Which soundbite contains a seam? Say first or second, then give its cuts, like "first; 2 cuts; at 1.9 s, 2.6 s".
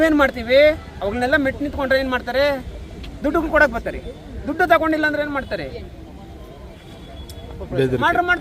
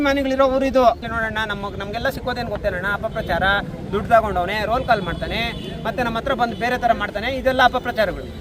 second; 1 cut; at 1.0 s